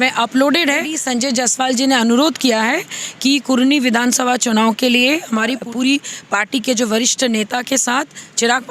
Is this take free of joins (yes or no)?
no